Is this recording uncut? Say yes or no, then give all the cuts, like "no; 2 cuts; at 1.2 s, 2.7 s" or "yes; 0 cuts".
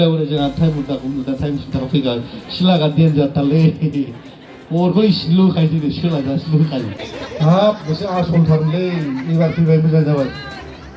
no; 1 cut; at 7.0 s